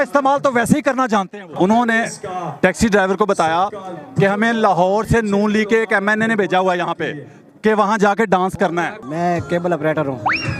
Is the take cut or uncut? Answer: cut